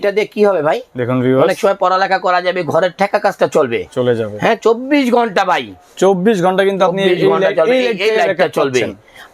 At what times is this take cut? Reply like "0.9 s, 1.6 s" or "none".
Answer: none